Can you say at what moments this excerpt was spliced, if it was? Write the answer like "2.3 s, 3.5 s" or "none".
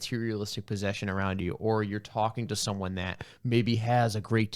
none